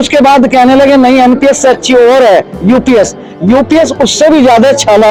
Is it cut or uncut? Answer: uncut